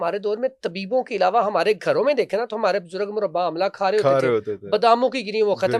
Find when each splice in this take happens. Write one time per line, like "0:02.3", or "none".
none